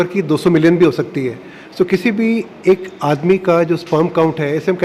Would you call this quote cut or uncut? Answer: uncut